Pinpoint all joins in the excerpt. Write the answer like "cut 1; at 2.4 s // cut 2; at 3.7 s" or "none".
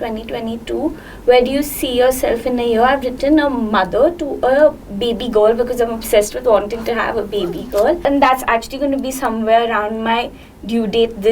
cut 1; at 8.0 s